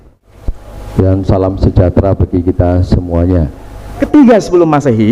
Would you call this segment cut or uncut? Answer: cut